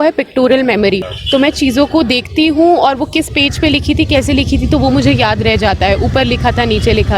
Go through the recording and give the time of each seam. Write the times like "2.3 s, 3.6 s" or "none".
1.1 s